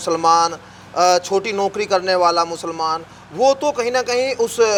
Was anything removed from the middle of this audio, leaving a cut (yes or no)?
no